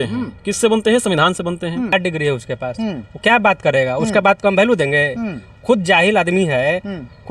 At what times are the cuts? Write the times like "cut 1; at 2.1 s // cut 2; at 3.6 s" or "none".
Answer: cut 1; at 1.9 s